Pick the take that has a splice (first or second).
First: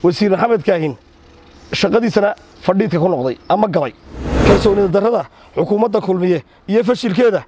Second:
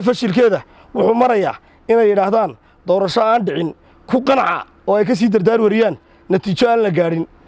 first